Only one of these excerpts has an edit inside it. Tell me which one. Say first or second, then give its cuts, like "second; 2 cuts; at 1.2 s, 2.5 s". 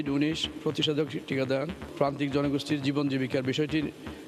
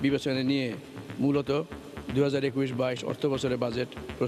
first; 1 cut; at 1.8 s